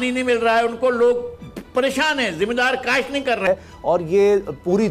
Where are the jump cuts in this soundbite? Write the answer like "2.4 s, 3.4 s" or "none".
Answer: 3.5 s